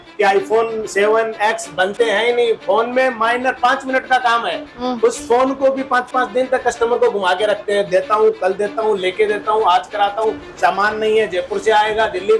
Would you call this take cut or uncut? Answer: uncut